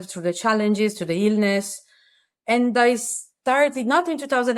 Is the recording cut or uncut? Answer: uncut